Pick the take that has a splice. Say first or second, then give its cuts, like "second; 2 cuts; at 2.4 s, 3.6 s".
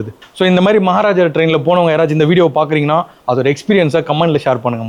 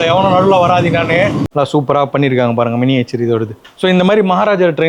second; 1 cut; at 1.5 s